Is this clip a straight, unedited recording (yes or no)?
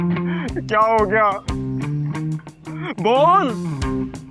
yes